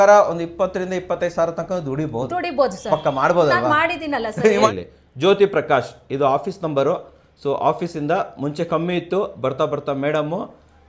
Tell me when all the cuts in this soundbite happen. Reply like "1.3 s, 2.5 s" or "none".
4.7 s